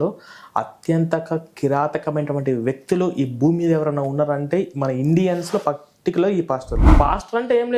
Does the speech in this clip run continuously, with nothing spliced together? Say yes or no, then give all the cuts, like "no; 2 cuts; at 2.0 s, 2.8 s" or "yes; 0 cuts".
no; 1 cut; at 6.8 s